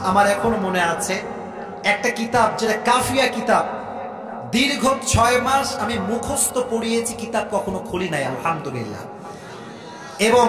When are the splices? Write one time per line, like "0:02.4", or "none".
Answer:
none